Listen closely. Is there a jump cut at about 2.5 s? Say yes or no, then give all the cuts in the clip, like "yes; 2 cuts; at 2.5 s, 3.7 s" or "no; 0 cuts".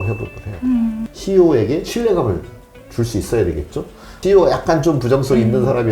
no; 2 cuts; at 1.1 s, 4.1 s